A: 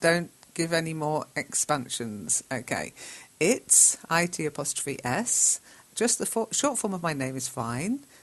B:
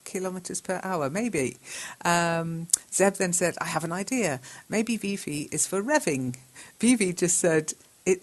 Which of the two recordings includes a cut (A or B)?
A